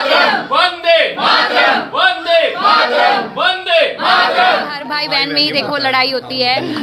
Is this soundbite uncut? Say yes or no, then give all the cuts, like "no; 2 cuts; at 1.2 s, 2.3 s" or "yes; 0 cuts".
no; 1 cut; at 4.9 s